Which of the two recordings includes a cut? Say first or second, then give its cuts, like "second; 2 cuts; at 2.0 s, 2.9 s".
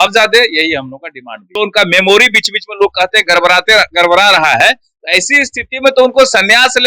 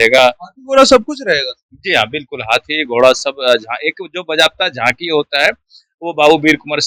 first; 1 cut; at 1.4 s